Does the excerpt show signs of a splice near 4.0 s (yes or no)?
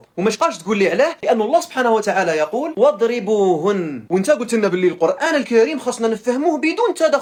no